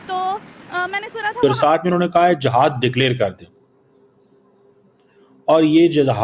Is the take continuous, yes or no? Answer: no